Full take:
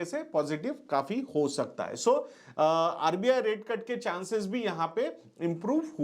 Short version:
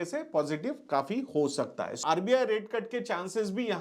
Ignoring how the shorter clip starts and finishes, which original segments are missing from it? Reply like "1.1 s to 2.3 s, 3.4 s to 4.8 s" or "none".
2.0 s to 2.9 s

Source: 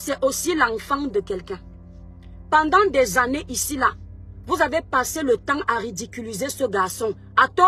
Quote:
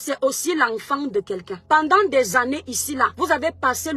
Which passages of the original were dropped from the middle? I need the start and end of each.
1.5 s to 2.3 s, 4.0 s to 4.4 s

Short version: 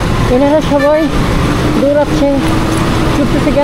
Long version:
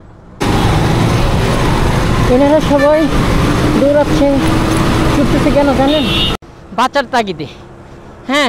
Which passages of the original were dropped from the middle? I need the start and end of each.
none

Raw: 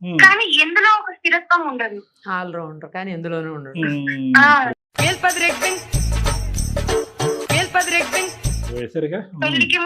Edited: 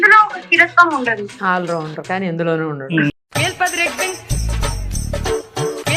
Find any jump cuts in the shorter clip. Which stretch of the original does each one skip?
2.0 s to 2.2 s, 4.0 s to 4.7 s

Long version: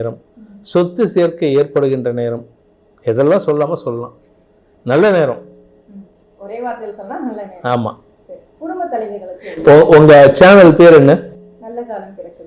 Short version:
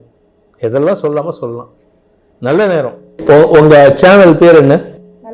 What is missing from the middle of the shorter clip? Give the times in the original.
5.5 s to 9.4 s

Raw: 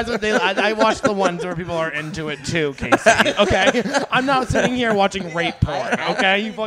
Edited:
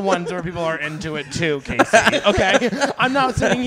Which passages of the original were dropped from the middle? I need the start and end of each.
none

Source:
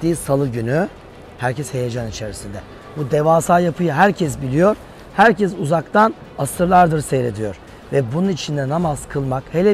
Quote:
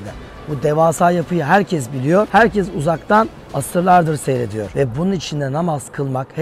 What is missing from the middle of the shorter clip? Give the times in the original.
4.8 s to 5.1 s, 7.5 s to 7.8 s

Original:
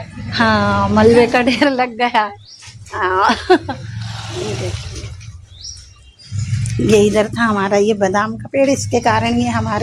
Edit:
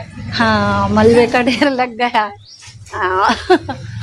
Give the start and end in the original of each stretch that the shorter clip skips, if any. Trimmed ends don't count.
none

